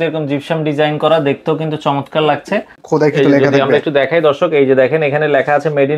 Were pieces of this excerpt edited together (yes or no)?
yes